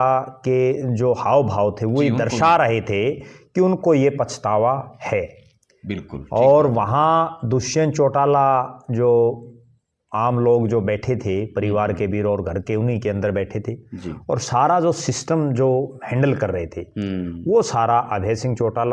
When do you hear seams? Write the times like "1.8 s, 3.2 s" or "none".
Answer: none